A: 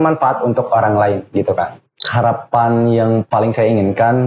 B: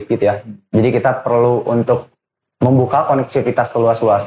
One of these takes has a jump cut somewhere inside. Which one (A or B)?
A